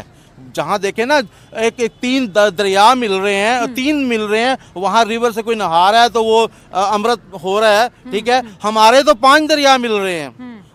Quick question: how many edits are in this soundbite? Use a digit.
0